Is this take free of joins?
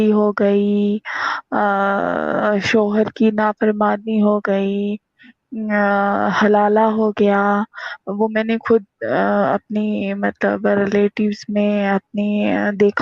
yes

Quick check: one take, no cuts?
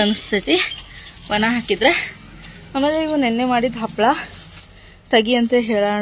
yes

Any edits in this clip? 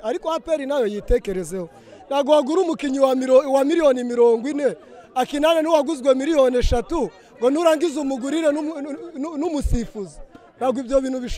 no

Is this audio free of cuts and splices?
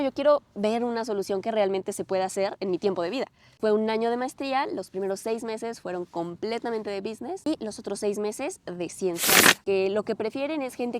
no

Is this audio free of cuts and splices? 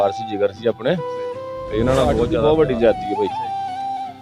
no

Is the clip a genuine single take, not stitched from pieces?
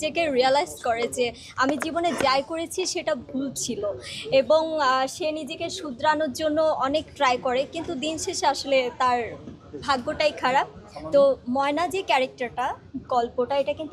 yes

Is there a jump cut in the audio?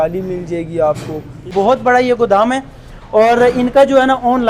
yes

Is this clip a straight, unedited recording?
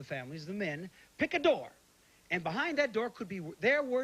no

